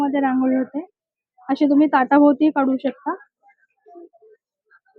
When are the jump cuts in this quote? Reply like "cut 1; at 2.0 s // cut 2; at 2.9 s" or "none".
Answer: none